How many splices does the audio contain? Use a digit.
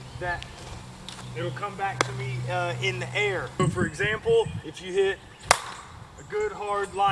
1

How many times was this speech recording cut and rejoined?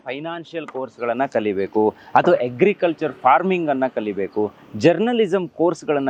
0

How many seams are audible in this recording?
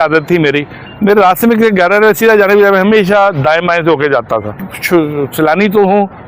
1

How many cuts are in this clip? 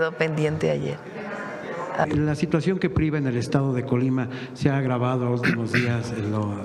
1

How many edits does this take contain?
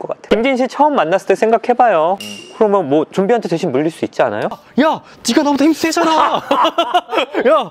2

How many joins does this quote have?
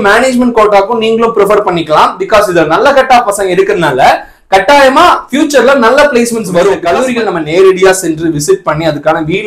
1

